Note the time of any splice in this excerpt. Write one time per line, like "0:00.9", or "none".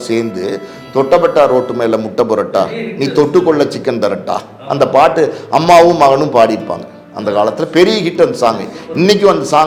none